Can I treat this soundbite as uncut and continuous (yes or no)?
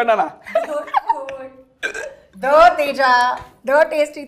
yes